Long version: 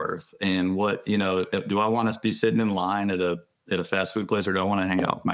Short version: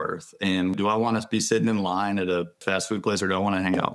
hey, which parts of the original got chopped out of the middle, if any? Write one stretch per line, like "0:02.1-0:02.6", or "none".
0:00.7-0:01.7
0:03.5-0:03.9